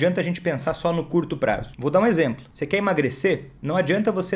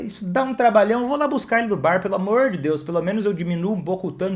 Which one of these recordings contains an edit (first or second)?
first